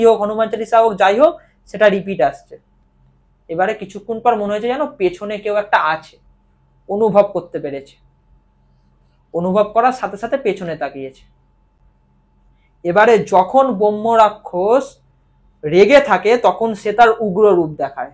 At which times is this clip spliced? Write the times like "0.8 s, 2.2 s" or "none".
none